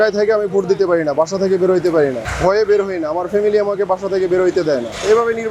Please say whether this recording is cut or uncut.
uncut